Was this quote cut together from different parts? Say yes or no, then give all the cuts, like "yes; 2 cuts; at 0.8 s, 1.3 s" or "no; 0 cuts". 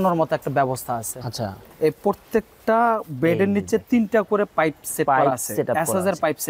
yes; 1 cut; at 1.6 s